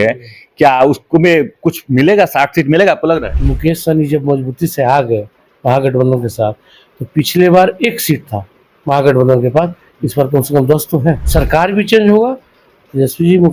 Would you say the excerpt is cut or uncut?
cut